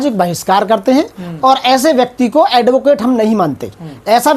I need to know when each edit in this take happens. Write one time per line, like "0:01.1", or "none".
none